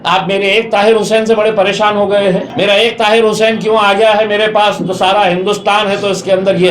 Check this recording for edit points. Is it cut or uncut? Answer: cut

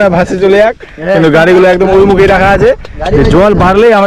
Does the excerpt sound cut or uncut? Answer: uncut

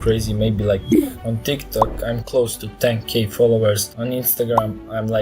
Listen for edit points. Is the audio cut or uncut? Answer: cut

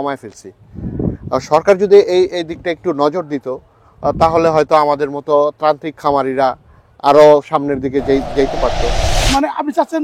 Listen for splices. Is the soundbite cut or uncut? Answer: cut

